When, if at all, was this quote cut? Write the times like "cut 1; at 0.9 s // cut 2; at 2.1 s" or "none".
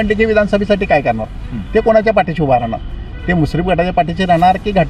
none